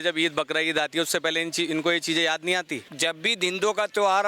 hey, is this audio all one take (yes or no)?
no